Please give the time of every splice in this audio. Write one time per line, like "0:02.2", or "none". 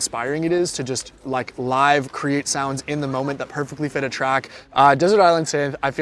0:04.6

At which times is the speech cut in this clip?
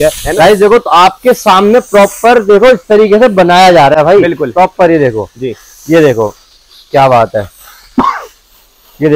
none

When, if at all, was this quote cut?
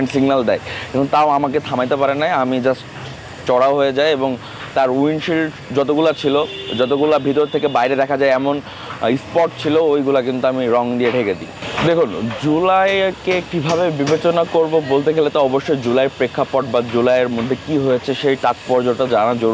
none

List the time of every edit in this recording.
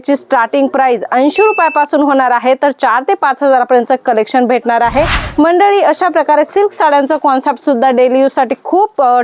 none

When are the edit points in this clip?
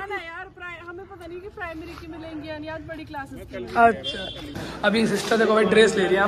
0:04.7

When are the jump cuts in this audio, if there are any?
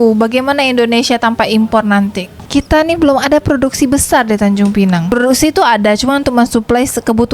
0:02.4

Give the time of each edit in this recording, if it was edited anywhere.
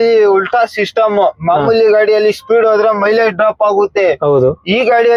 none

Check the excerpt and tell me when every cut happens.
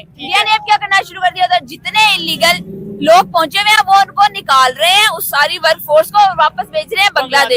none

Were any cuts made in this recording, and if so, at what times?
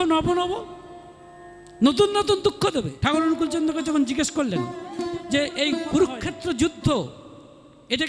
0:02.9

